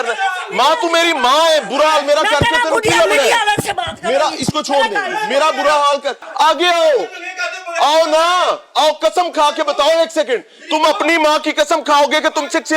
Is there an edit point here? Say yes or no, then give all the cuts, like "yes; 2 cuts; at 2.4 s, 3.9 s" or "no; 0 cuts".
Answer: yes; 1 cut; at 6.2 s